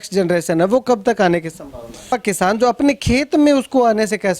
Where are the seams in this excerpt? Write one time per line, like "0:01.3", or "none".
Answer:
0:02.1